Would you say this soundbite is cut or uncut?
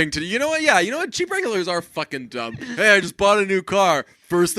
cut